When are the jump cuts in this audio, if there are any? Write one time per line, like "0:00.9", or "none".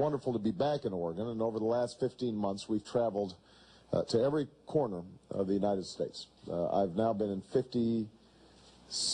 0:01.2